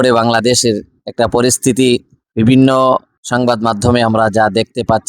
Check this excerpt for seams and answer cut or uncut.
cut